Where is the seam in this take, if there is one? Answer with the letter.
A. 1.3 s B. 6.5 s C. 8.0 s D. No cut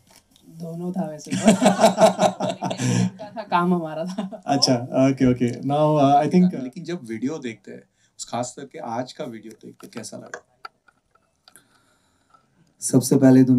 B